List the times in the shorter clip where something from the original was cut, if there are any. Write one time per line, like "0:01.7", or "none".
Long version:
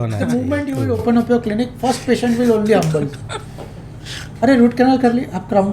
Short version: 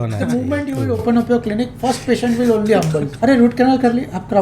0:03.1